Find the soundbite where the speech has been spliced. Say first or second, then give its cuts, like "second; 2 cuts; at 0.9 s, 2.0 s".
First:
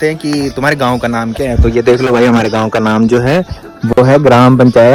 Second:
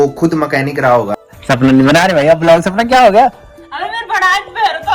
second; 1 cut; at 1.3 s